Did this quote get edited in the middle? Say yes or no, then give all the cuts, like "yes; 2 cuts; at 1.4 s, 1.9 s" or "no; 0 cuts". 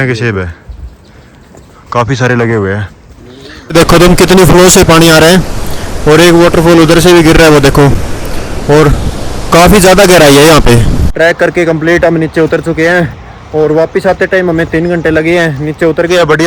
yes; 2 cuts; at 3.6 s, 11.0 s